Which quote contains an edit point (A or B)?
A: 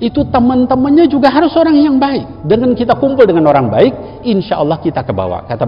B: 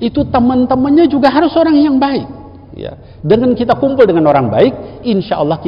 A